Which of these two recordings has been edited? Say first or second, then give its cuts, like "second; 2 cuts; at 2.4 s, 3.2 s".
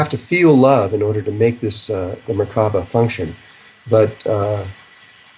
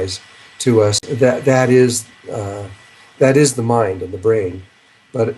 second; 1 cut; at 4.3 s